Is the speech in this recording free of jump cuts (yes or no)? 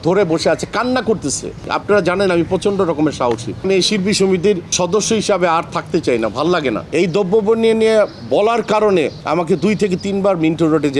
no